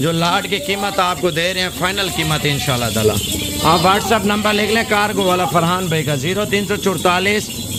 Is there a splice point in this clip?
no; 0 cuts

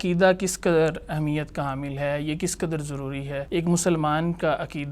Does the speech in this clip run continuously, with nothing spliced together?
no; 1 cut; at 3.5 s

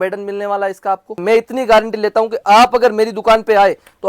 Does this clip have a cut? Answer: yes; 1 cut; at 1.2 s

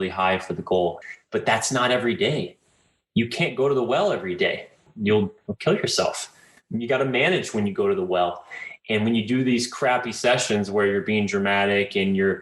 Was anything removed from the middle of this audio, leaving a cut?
yes; 3 cuts; at 1.0 s, 4.8 s, 5.4 s

